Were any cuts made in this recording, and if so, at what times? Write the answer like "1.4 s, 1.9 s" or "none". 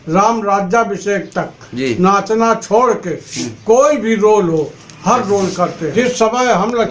5.9 s